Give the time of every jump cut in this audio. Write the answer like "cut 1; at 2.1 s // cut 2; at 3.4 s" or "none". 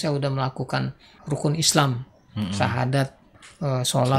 cut 1; at 1.1 s